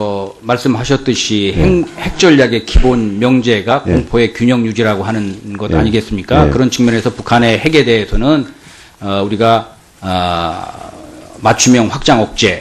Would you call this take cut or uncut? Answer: uncut